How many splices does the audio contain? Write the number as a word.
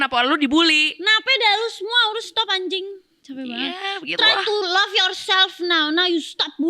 zero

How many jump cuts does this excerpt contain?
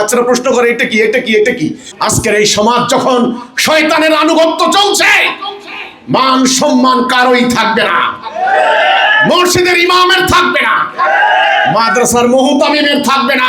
one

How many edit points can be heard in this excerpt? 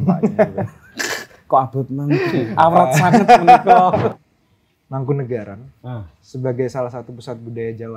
one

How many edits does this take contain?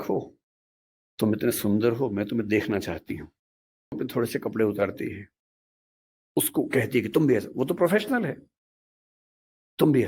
one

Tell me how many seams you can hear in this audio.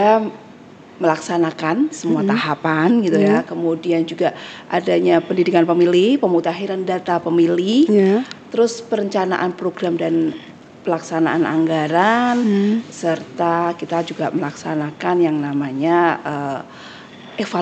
zero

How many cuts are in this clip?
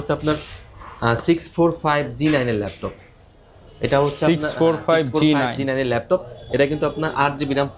zero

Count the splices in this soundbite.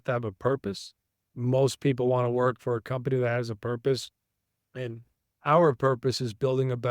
one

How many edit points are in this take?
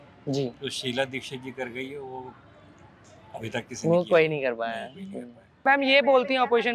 one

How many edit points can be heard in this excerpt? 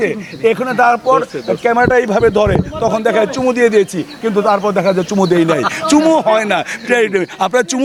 zero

